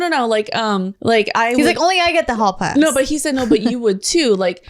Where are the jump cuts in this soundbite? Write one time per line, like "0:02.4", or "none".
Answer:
0:00.9